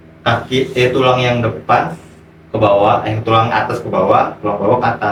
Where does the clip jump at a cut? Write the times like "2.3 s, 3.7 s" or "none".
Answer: none